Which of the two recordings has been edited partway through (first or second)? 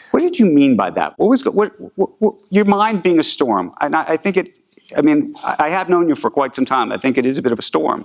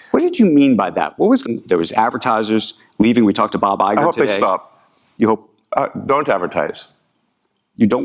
second